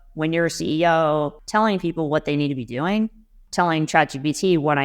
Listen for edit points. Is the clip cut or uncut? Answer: cut